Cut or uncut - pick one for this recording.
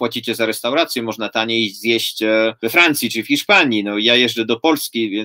cut